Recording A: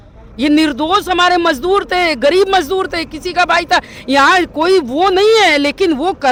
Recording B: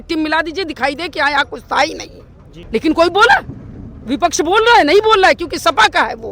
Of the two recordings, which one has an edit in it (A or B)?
B